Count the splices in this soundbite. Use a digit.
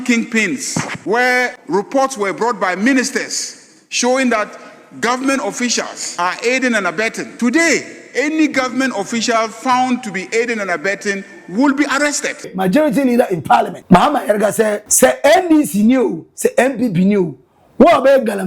7